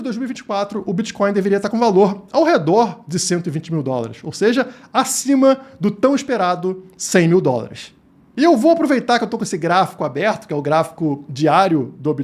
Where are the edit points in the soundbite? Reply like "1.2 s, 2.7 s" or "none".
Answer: none